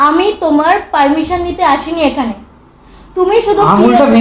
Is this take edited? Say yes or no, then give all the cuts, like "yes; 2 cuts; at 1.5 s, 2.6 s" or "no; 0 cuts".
no; 0 cuts